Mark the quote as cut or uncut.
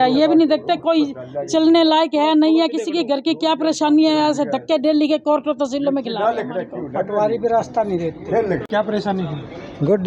cut